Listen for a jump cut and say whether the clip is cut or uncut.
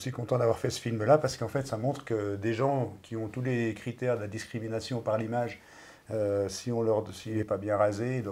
cut